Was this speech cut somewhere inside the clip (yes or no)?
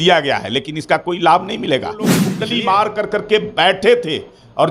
yes